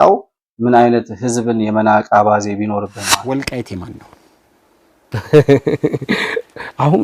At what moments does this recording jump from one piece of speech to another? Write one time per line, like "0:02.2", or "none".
0:03.2